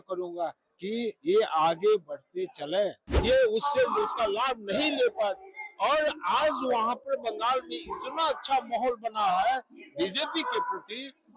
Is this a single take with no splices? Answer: no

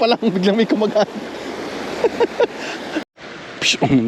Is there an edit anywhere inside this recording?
yes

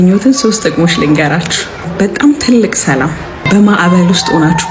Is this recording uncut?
no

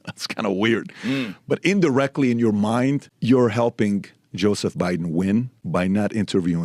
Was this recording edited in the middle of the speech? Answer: yes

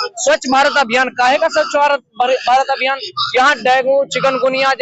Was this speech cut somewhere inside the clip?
no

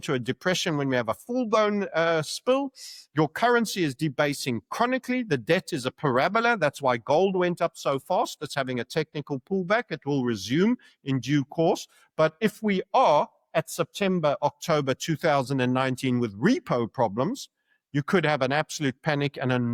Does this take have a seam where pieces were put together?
no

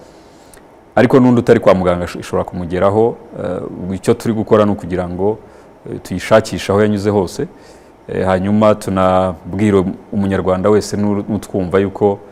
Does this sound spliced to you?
no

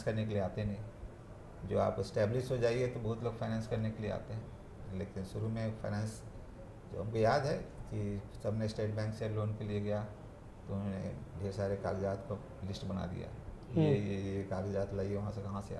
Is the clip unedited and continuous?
yes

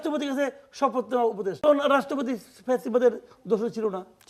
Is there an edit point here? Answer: yes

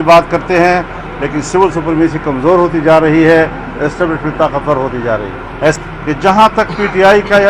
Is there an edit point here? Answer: yes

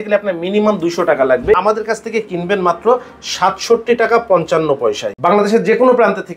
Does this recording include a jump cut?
yes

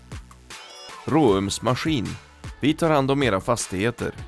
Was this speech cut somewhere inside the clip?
yes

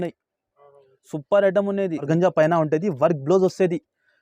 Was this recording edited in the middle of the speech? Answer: yes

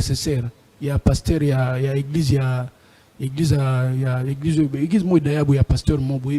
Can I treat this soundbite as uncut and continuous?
yes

